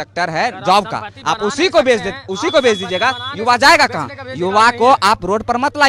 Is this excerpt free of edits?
yes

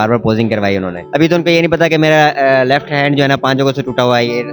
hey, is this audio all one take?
no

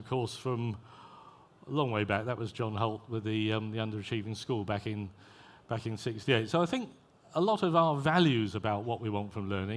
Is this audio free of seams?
no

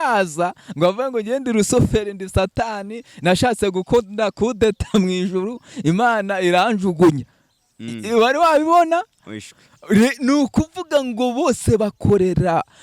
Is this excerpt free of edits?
yes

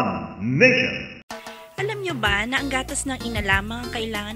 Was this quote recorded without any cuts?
no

